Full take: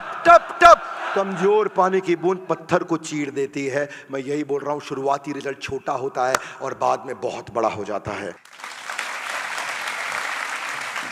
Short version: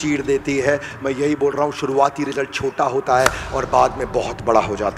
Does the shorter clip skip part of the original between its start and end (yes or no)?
no